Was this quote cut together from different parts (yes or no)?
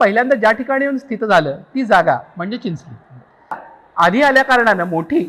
yes